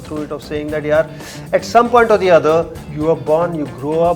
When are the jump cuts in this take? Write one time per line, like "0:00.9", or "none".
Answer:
0:02.8